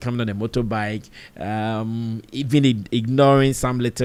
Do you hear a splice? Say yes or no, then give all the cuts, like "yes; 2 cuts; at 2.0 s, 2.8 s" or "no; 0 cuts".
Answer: no; 0 cuts